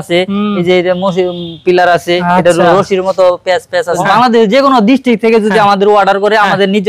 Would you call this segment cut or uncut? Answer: cut